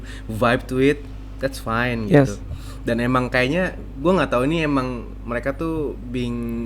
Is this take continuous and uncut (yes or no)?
yes